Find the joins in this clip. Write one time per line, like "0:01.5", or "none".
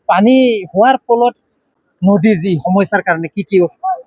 0:01.7